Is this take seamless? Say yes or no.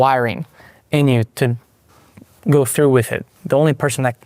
no